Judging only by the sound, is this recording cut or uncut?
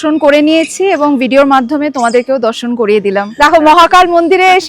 cut